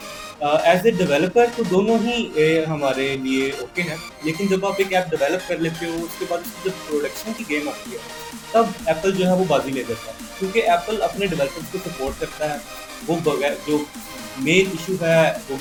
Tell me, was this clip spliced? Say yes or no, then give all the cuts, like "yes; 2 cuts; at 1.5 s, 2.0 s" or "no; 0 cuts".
no; 0 cuts